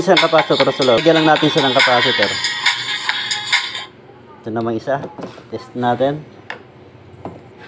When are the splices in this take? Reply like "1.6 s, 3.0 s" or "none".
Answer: 1.0 s